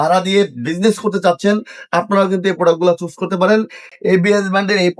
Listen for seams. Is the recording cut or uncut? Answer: cut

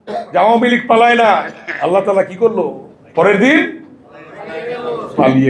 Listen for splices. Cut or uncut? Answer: uncut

